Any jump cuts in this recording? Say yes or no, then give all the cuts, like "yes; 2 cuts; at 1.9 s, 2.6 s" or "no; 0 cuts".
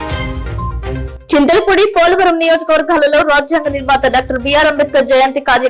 yes; 1 cut; at 1.1 s